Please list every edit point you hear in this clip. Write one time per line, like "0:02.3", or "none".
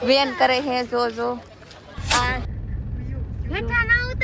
0:02.5